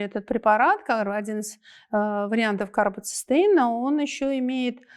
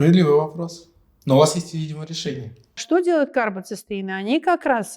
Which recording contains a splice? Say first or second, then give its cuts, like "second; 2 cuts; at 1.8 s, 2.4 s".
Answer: second; 1 cut; at 2.7 s